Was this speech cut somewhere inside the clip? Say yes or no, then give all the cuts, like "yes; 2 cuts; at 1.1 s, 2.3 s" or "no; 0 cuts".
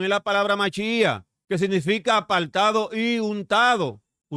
yes; 1 cut; at 1.3 s